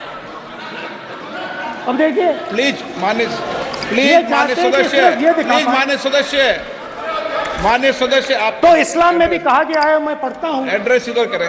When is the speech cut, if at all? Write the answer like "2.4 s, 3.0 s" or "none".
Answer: none